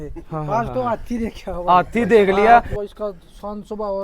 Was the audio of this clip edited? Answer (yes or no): yes